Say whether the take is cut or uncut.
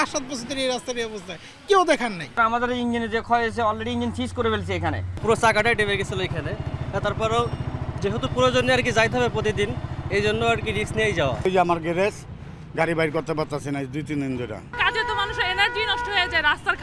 cut